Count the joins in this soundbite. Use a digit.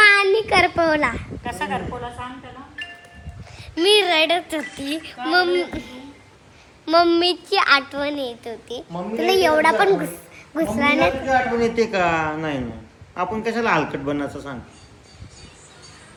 0